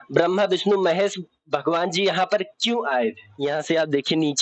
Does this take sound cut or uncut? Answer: cut